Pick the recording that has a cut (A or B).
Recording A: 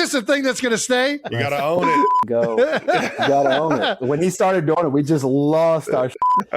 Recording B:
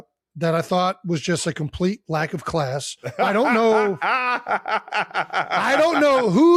A